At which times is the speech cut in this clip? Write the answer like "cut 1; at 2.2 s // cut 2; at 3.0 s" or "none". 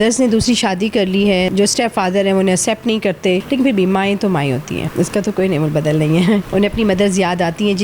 cut 1; at 1.5 s // cut 2; at 3.4 s // cut 3; at 4.9 s // cut 4; at 6.5 s